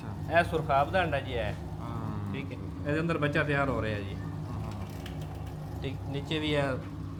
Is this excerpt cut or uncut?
uncut